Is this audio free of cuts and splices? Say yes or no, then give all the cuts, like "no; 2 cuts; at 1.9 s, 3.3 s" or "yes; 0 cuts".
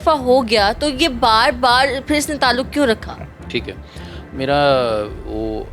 yes; 0 cuts